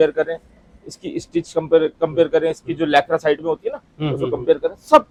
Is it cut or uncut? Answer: uncut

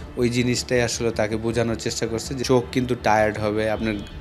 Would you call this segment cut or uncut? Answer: cut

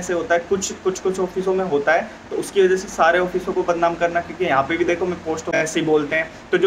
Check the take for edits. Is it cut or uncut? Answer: cut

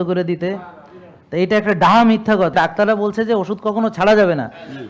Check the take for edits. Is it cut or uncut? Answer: cut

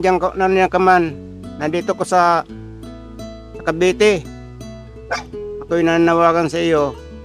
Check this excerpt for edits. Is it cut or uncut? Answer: uncut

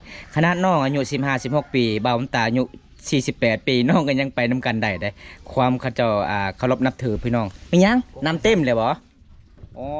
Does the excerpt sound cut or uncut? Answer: uncut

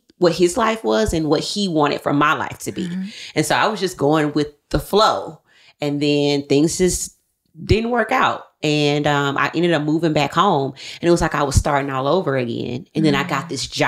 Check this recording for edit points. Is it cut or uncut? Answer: uncut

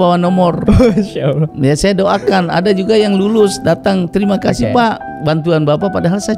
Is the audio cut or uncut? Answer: cut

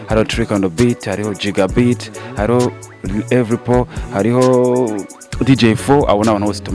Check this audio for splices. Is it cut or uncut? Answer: uncut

